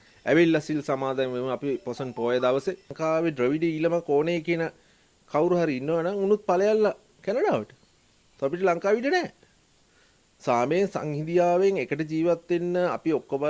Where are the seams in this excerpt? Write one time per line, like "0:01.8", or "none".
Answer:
0:02.9